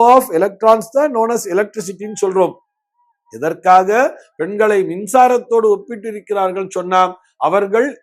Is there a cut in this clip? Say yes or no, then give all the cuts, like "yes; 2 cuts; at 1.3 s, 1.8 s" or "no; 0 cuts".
no; 0 cuts